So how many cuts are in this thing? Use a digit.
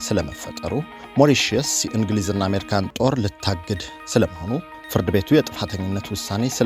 2